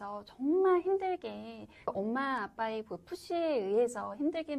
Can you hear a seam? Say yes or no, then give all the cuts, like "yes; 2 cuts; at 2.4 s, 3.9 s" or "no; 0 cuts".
no; 0 cuts